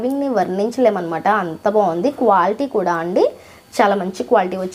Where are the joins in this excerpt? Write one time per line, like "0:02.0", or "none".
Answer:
none